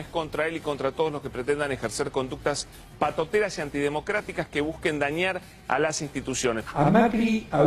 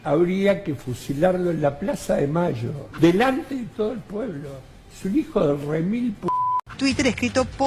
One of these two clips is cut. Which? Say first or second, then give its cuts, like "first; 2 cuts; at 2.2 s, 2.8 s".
second; 1 cut; at 6.6 s